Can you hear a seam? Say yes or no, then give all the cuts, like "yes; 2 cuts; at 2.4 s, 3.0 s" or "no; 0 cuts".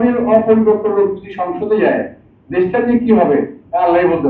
no; 0 cuts